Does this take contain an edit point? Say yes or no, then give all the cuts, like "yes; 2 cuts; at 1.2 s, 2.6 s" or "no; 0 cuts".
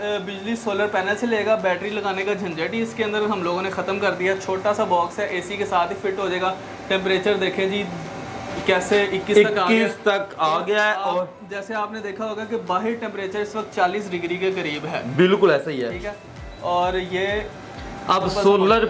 no; 0 cuts